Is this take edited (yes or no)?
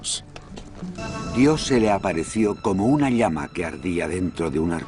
no